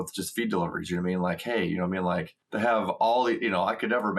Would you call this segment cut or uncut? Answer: cut